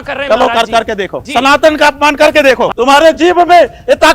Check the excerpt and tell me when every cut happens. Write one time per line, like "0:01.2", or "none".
0:02.7